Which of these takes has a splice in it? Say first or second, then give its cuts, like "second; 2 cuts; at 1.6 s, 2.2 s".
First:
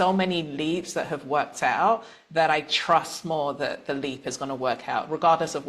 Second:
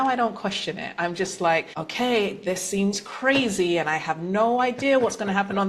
second; 1 cut; at 1.8 s